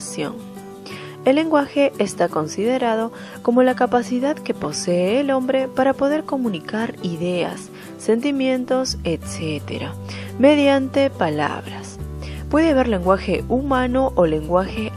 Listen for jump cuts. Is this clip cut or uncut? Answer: uncut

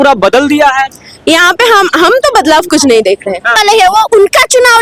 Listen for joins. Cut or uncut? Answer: cut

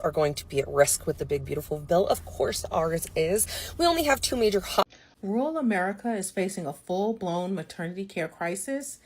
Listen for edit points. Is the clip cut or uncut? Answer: cut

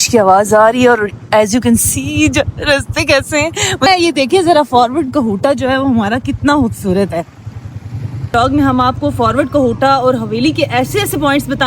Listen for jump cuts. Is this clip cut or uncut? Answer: cut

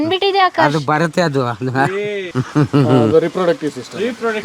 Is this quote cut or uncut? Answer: uncut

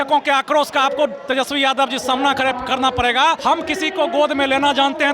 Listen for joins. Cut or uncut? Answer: cut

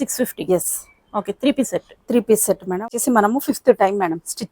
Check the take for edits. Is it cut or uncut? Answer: cut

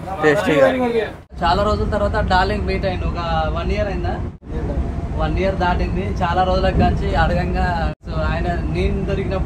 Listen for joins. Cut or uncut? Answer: cut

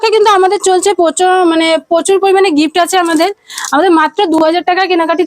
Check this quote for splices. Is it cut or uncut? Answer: uncut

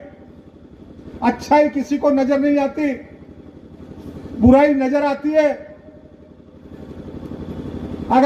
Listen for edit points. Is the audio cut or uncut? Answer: uncut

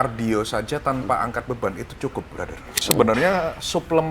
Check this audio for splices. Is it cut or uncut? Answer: cut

